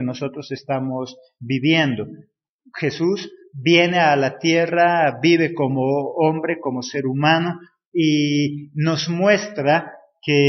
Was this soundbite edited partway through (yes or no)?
yes